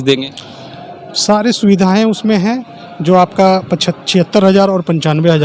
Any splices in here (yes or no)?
no